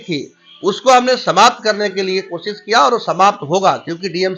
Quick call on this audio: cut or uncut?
uncut